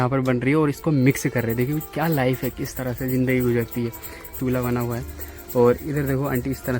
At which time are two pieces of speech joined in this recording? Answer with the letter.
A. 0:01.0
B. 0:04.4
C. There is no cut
B